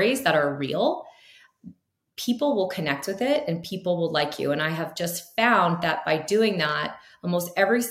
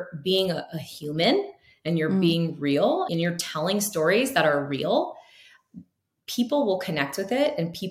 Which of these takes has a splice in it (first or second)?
second